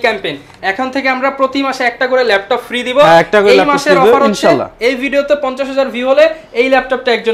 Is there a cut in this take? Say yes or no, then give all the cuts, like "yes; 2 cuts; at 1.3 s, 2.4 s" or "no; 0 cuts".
no; 0 cuts